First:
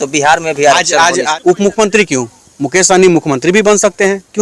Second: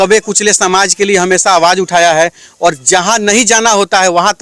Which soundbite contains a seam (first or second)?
first